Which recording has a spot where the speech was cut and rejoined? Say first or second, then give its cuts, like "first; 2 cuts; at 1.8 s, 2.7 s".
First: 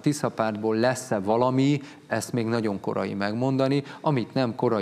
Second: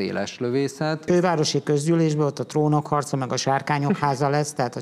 second; 1 cut; at 1.0 s